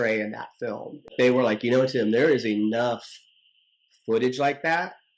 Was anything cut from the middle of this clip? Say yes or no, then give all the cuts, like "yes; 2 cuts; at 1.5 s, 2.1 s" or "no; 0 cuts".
yes; 1 cut; at 1.1 s